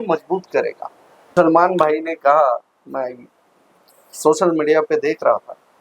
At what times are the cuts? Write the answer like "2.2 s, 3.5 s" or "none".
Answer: 1.3 s